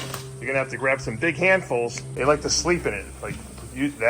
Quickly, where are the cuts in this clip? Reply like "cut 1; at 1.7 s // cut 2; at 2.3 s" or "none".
cut 1; at 2.0 s